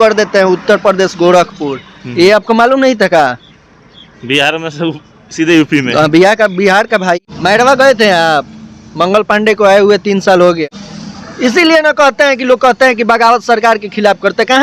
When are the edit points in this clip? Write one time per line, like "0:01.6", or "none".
0:07.2
0:10.6

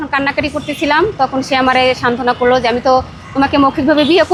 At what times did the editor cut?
none

